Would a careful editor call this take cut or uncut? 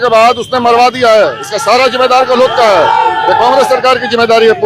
uncut